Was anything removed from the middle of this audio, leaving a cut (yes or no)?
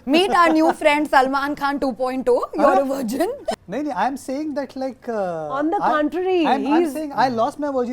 yes